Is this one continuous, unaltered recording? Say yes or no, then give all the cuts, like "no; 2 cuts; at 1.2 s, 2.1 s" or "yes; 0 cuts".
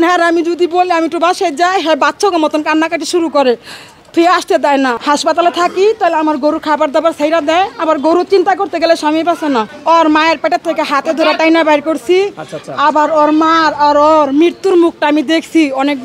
no; 2 cuts; at 5.0 s, 9.7 s